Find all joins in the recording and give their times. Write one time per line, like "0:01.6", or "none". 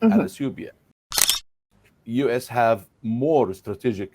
0:01.4